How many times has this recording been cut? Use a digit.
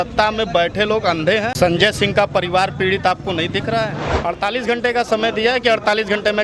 2